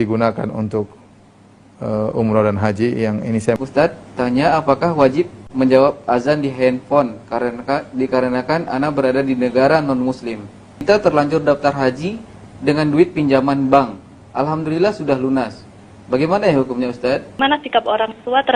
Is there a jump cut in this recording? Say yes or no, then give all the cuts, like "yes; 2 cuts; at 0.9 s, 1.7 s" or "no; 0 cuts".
yes; 3 cuts; at 3.6 s, 10.8 s, 17.4 s